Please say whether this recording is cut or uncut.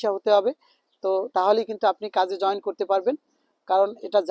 uncut